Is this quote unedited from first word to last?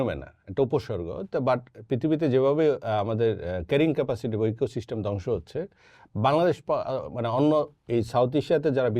yes; 0 cuts

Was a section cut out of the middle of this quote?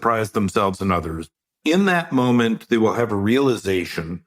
yes; 1 cut; at 1.4 s

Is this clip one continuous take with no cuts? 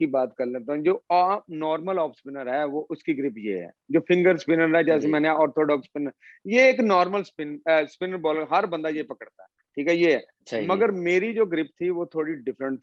yes; 0 cuts

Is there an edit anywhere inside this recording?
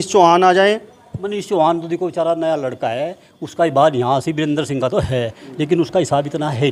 no; 0 cuts

